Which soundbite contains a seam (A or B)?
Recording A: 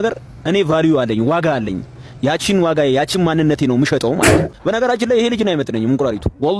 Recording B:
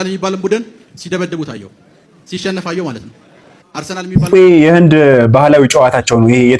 B